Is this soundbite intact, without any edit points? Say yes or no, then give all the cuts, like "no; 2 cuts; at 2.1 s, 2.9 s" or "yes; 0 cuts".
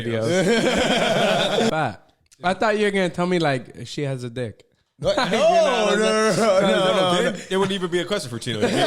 no; 1 cut; at 1.7 s